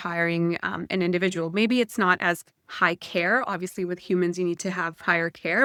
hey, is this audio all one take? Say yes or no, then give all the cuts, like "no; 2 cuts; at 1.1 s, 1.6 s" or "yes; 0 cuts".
yes; 0 cuts